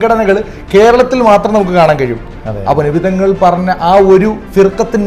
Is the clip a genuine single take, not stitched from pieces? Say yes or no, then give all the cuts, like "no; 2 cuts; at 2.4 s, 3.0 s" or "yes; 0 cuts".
yes; 0 cuts